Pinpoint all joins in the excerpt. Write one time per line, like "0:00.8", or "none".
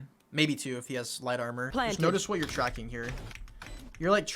0:01.7

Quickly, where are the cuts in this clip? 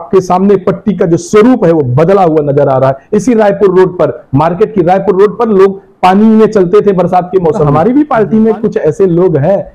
0:07.6

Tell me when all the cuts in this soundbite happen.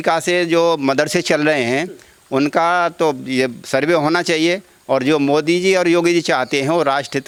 none

